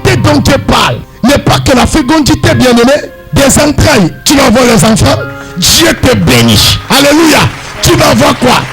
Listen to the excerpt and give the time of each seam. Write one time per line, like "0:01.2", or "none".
0:01.0
0:03.2
0:04.2